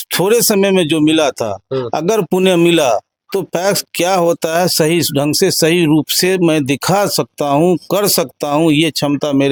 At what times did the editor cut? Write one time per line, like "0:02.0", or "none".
none